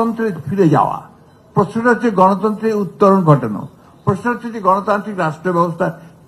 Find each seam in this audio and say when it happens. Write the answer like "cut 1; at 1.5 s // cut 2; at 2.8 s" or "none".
none